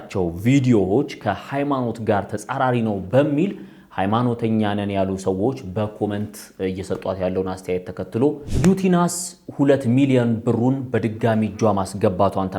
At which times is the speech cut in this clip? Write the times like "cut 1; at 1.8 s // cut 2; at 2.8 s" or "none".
cut 1; at 8.5 s